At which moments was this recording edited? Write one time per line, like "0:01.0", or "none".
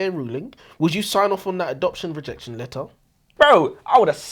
0:03.3